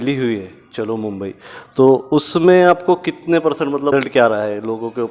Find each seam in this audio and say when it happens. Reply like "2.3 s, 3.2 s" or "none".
3.9 s